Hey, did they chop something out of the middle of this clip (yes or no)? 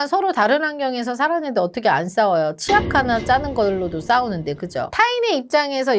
no